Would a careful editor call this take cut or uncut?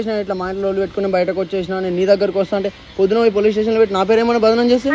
uncut